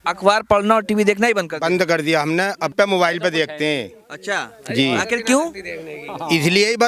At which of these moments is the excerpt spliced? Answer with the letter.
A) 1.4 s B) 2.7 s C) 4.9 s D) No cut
B